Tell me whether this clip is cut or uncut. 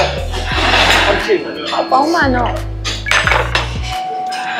uncut